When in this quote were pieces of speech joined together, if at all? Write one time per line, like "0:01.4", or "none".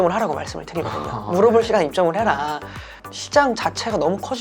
0:03.0